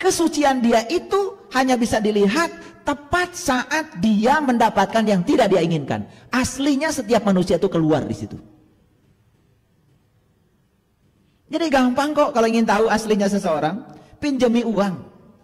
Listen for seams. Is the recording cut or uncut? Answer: uncut